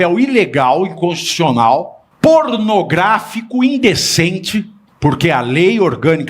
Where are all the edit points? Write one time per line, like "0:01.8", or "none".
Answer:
0:02.0
0:04.8